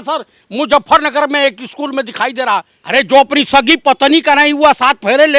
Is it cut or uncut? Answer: cut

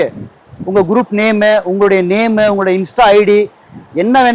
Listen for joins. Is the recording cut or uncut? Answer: uncut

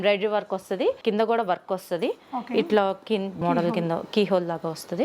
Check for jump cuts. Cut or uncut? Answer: cut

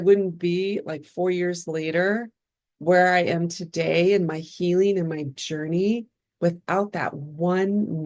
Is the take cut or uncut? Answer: uncut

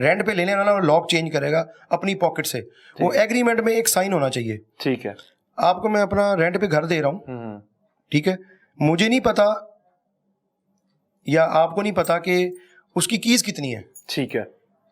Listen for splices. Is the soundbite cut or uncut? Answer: uncut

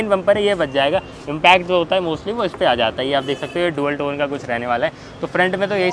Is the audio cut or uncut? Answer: uncut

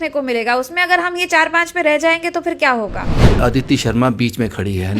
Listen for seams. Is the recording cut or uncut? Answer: cut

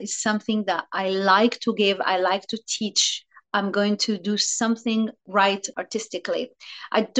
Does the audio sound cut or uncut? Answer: cut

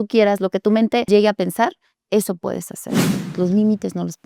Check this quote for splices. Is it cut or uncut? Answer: cut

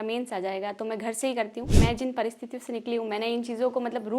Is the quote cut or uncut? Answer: cut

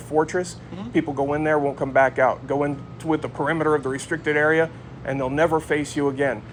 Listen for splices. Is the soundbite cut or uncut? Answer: uncut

